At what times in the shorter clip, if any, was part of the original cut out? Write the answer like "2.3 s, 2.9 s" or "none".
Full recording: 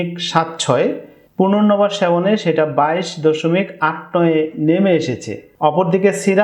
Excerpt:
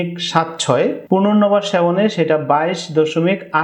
1.0 s